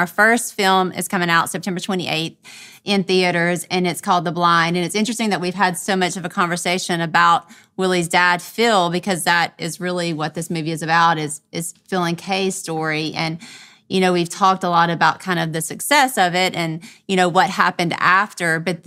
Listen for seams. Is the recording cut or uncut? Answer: uncut